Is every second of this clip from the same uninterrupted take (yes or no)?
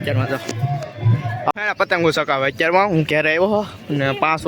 no